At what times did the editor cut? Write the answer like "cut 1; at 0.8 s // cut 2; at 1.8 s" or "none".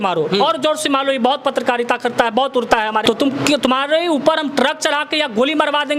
cut 1; at 3.0 s